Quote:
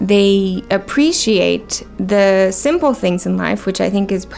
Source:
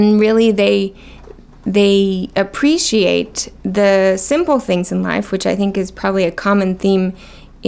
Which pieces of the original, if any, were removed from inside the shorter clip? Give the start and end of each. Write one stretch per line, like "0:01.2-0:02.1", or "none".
none